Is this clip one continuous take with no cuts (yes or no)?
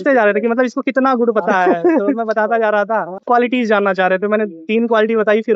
no